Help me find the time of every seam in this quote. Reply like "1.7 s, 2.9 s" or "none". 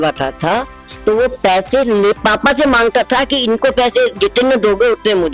none